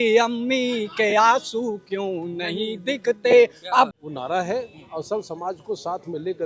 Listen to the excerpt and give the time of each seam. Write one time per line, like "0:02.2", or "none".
0:03.9